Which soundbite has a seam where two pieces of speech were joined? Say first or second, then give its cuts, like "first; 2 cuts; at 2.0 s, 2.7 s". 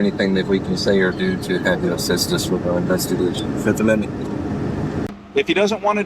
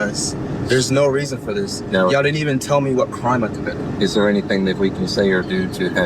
first; 1 cut; at 5.1 s